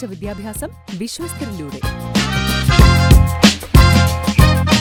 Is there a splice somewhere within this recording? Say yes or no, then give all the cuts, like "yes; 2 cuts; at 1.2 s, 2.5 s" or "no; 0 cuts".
no; 0 cuts